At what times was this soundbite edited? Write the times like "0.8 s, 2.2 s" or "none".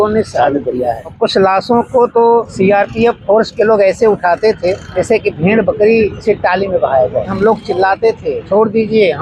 1.1 s, 2.5 s, 4.9 s, 6.2 s, 7.3 s, 8.4 s